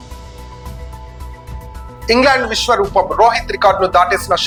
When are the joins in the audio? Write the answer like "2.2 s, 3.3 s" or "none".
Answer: none